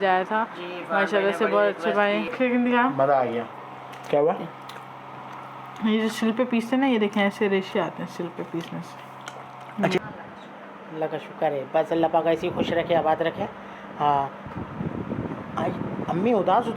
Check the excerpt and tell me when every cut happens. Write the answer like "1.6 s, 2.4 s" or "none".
2.3 s, 10.0 s